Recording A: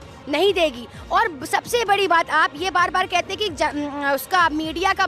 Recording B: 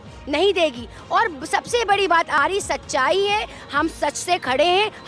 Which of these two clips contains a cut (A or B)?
B